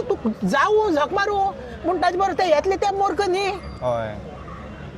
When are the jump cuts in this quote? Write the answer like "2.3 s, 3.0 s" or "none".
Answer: none